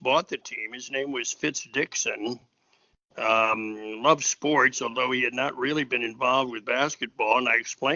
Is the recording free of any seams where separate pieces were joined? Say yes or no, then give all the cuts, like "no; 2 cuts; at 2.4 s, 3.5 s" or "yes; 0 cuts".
yes; 0 cuts